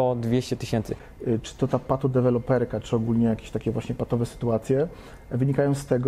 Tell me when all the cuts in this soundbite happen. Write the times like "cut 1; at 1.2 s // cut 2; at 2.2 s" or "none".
cut 1; at 1.0 s